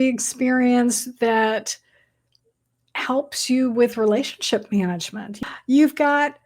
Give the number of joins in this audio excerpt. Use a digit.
1